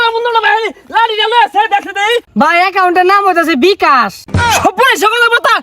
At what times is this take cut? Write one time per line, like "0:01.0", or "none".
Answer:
0:02.3
0:04.5

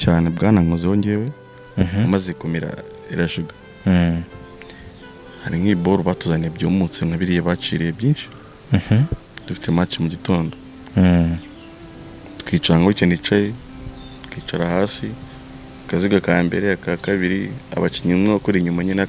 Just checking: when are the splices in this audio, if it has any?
0:01.5

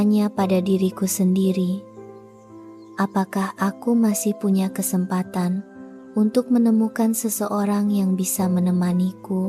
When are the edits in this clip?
none

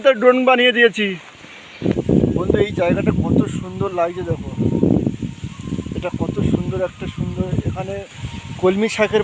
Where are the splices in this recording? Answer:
0:01.8

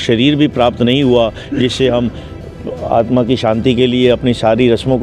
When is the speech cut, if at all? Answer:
none

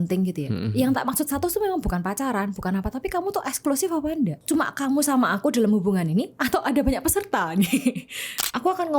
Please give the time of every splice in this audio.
0:04.4
0:08.0

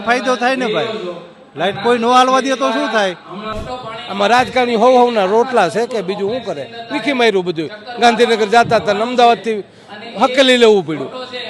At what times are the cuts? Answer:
0:03.5

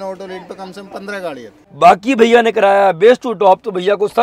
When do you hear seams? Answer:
0:01.6

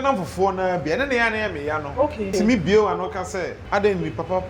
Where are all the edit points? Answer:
0:02.3
0:03.6

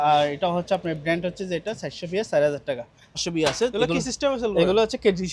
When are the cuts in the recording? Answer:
0:03.3

